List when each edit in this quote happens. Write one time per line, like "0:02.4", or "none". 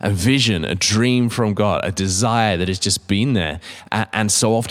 none